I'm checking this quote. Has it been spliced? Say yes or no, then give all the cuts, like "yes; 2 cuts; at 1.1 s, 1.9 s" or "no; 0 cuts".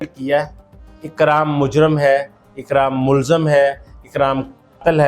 no; 0 cuts